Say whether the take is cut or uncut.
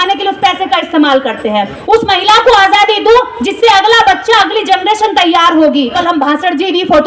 cut